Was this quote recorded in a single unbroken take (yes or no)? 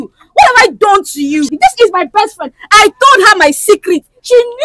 no